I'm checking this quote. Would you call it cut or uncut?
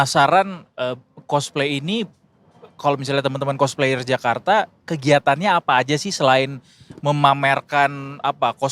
uncut